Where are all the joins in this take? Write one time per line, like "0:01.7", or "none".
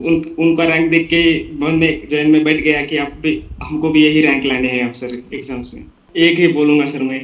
0:06.0